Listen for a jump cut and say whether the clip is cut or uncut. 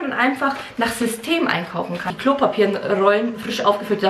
cut